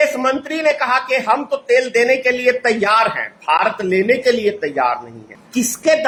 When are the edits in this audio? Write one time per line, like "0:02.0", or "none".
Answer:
none

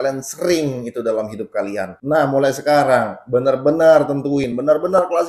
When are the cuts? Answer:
none

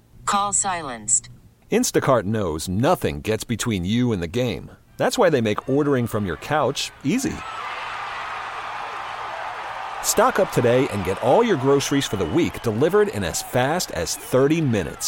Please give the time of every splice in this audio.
none

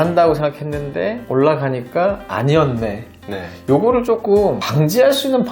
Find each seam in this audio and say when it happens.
none

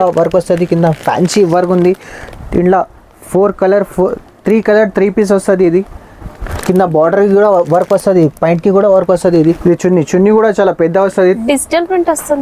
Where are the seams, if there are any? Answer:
0:09.6

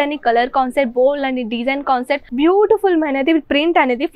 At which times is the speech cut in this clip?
0:02.2

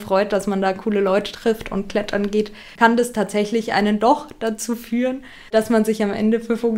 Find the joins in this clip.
0:02.6
0:05.5

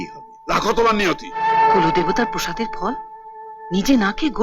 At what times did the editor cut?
0:01.4

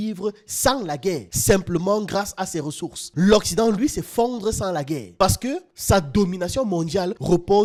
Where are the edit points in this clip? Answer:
none

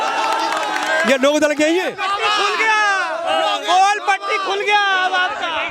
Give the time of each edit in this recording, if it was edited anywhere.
0:02.0

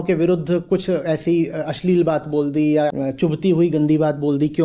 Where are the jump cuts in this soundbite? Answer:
0:03.0

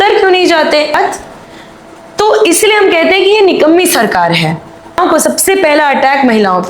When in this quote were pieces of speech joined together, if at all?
0:00.9
0:05.0

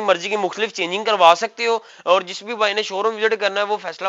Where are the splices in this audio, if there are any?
0:01.9

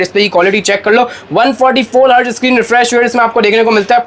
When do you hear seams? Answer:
none

